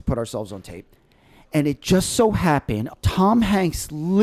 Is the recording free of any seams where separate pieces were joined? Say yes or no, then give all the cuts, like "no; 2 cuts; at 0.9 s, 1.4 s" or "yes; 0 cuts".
no; 1 cut; at 2.9 s